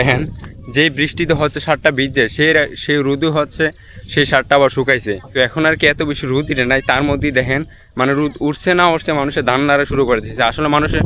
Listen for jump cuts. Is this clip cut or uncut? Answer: uncut